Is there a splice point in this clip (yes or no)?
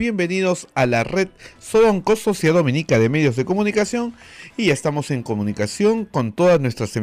no